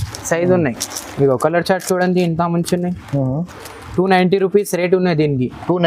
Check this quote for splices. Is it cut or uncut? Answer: uncut